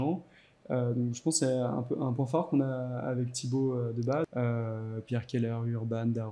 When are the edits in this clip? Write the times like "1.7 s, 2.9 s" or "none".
4.3 s